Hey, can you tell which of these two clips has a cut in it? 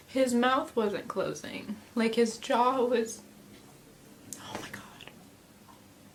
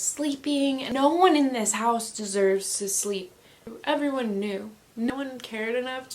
second; 3 cuts; at 0.9 s, 3.7 s, 5.1 s

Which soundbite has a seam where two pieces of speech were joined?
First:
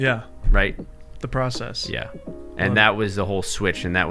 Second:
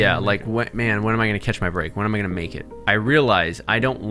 second; 1 cut; at 2.6 s

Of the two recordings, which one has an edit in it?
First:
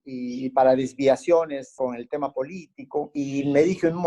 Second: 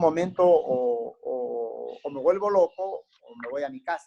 first; 2 cuts; at 1.7 s, 3.1 s

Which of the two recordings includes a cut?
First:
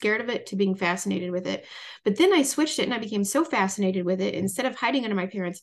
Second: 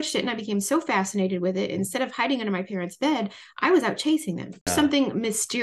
second; 1 cut; at 4.7 s

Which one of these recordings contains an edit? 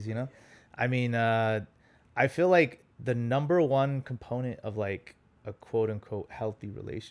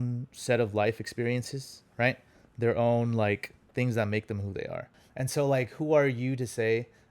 second; 1 cut; at 5.0 s

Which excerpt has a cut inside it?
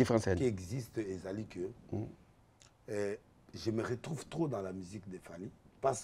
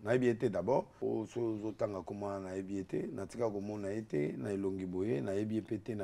second; 1 cut; at 0.9 s

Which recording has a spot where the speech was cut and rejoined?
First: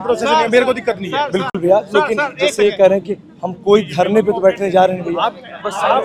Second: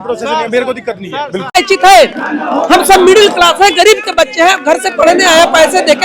second; 1 cut; at 1.5 s

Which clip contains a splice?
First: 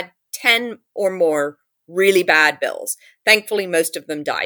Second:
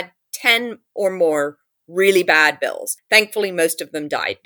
second; 1 cut; at 2.9 s

